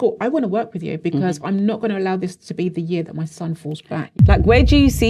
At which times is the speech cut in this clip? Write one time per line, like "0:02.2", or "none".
0:04.0